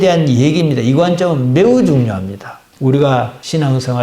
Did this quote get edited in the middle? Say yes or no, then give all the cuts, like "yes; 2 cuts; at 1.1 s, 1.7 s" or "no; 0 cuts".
yes; 1 cut; at 2.7 s